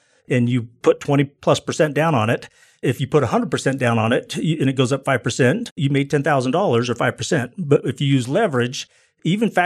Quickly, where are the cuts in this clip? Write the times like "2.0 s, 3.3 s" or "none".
5.8 s